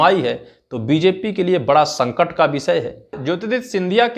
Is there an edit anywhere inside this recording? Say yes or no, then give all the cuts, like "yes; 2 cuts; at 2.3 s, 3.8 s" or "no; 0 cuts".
yes; 1 cut; at 3.2 s